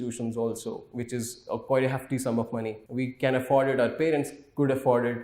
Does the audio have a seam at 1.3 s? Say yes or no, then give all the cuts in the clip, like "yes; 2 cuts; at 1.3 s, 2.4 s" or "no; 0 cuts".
no; 1 cut; at 2.8 s